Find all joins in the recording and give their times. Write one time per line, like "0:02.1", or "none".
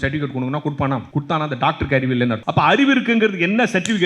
0:01.1
0:02.4